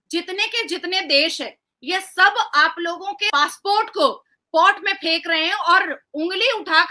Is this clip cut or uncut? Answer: cut